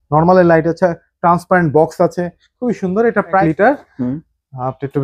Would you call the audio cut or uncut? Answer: cut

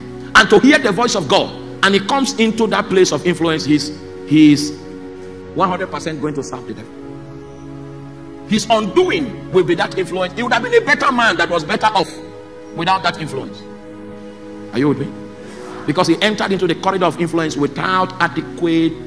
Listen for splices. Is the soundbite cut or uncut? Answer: cut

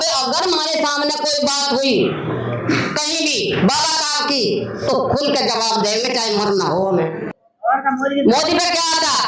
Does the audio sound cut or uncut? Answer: cut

